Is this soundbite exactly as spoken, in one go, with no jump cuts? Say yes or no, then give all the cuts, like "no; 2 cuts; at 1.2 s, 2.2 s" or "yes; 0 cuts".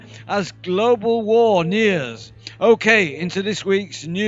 no; 1 cut; at 3.1 s